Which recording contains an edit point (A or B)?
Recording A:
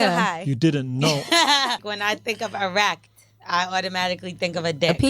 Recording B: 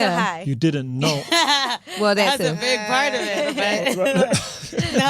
A